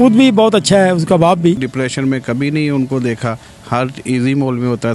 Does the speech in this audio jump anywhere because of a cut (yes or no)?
yes